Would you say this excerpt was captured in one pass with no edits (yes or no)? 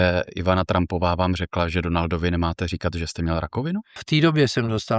no